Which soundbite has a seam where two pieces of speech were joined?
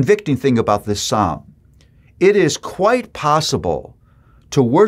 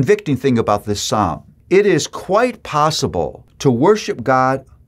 second; 2 cuts; at 1.5 s, 3.4 s

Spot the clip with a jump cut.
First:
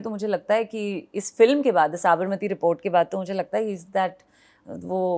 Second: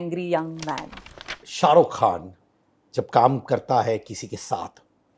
second; 1 cut; at 1.0 s

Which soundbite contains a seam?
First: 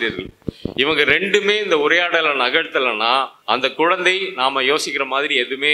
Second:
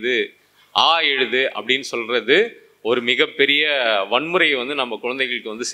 first; 1 cut; at 3.4 s

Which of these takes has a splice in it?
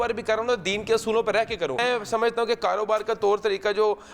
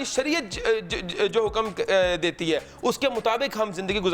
first; 1 cut; at 1.8 s

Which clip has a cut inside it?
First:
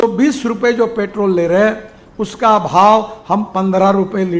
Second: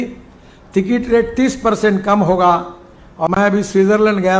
second; 1 cut; at 3.3 s

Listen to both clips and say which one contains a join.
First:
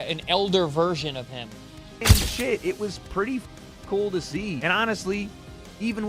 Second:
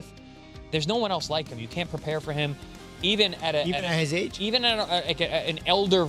first; 1 cut; at 2.0 s

